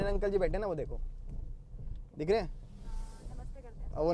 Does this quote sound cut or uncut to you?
uncut